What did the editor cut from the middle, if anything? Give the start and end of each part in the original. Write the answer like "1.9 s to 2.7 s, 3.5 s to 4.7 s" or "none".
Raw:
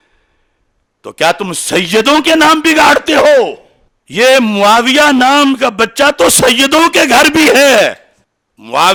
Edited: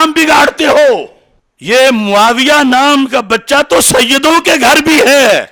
none